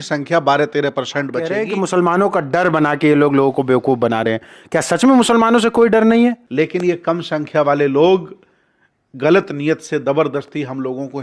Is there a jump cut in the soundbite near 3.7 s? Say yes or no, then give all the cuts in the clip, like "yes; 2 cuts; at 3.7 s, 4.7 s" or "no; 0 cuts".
no; 2 cuts; at 1.5 s, 6.4 s